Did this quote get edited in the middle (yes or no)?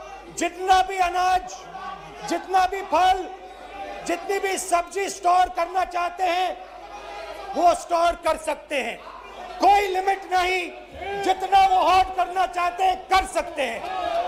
no